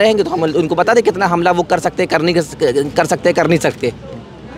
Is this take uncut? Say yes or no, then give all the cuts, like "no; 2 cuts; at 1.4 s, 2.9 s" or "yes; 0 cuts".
yes; 0 cuts